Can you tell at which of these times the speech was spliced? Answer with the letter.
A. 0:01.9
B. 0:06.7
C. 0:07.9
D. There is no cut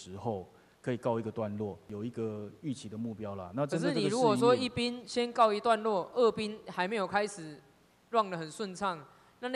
A